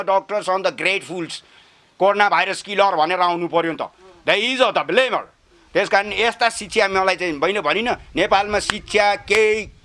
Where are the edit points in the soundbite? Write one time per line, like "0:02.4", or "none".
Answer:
none